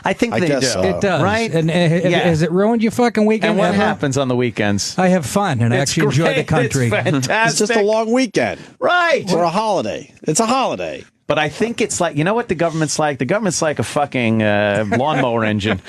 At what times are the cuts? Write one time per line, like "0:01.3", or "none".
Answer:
0:14.7

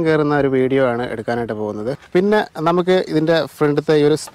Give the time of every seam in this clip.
0:01.8

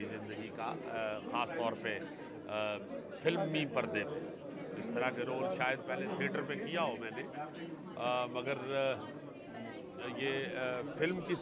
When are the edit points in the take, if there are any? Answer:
none

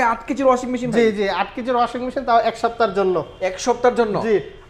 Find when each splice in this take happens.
none

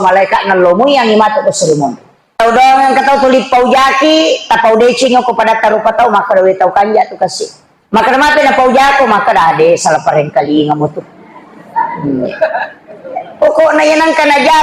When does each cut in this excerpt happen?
0:02.4

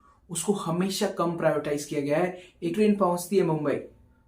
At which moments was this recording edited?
0:02.7

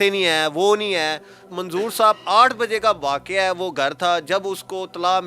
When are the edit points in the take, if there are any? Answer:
0:01.4

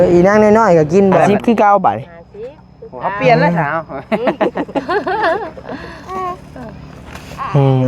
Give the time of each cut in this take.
0:01.2

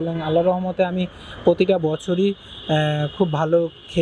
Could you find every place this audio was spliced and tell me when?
none

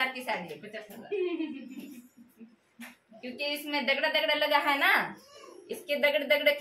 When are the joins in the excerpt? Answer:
none

